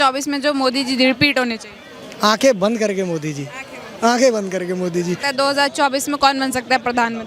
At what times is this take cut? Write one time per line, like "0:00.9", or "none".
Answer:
0:05.2